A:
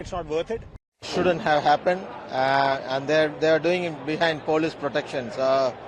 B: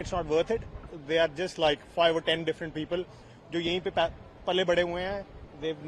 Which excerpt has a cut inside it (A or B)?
A